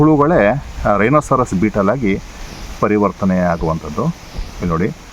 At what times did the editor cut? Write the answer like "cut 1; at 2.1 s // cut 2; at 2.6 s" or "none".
none